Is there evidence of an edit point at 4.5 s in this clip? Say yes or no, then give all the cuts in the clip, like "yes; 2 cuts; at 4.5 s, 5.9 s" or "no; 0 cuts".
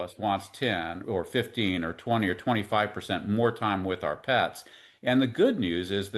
no; 1 cut; at 1.0 s